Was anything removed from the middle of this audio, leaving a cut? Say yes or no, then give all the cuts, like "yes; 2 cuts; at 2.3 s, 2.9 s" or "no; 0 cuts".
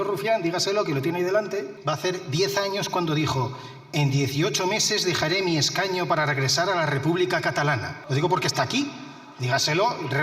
yes; 2 cuts; at 1.7 s, 7.9 s